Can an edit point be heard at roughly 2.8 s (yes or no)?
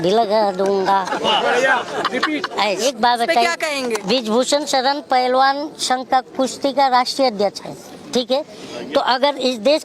yes